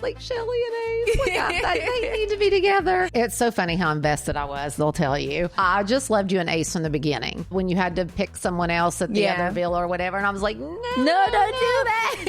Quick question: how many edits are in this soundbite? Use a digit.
3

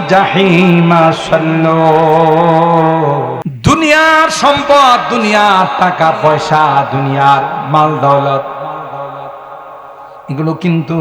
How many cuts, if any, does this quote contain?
1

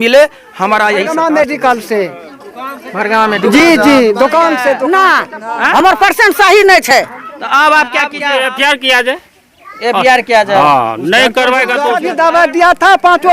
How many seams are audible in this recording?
4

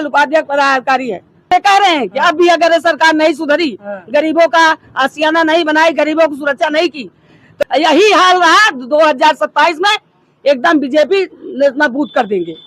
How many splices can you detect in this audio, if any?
2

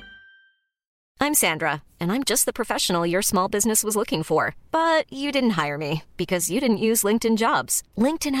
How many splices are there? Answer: 1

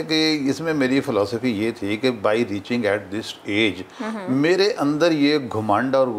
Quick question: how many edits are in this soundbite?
0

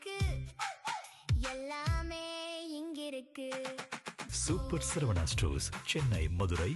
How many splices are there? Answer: 0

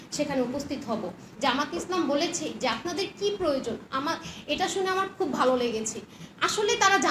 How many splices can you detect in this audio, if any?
1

